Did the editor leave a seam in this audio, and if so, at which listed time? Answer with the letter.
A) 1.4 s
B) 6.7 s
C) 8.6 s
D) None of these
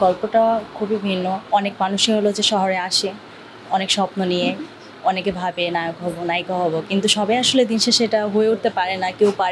A